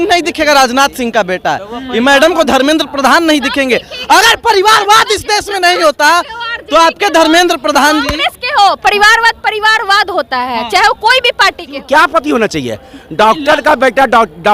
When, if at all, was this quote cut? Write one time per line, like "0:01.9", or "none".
0:11.8